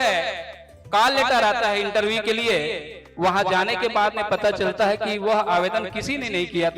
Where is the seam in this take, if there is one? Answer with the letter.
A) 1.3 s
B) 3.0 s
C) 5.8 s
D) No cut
B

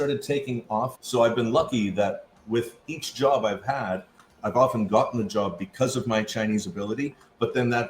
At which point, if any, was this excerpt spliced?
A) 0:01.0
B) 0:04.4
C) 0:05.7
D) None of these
A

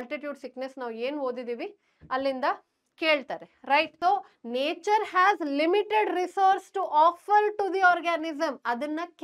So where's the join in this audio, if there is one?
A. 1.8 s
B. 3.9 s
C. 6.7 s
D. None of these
B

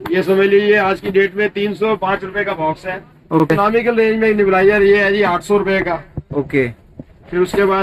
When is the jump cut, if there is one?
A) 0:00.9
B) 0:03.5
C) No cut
B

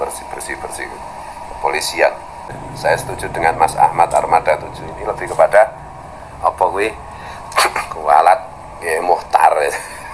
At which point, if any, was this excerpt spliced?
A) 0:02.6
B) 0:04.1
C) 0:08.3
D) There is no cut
A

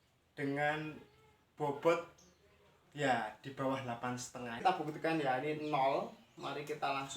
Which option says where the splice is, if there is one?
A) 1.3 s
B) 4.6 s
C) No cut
B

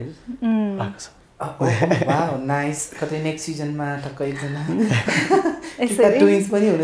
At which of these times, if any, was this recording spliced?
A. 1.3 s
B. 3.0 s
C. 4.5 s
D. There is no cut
D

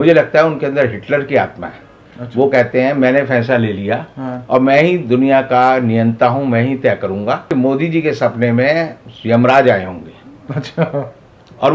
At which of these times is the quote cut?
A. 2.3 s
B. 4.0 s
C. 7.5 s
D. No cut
C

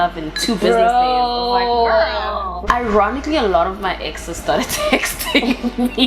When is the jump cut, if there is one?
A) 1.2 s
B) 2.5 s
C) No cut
B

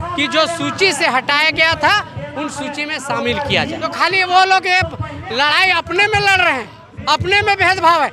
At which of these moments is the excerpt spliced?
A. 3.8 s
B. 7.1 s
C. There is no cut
A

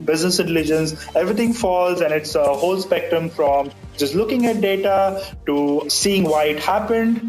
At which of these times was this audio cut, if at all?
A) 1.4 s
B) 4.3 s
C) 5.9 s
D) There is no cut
C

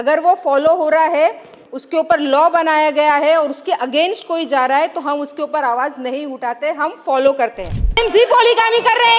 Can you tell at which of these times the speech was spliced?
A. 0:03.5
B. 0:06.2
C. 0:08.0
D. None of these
C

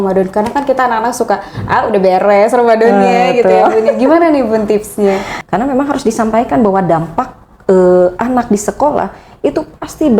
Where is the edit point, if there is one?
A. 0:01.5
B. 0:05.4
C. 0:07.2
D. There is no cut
B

